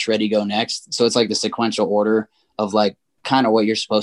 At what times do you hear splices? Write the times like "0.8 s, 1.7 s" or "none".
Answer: none